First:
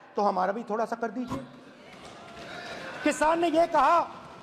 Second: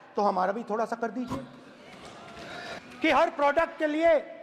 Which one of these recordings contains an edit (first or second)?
second